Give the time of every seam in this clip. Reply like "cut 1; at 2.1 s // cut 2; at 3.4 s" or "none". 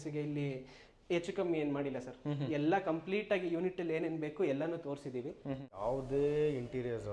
cut 1; at 5.7 s